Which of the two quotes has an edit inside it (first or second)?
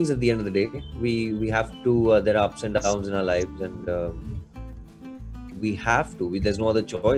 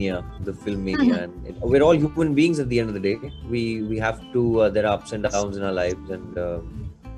second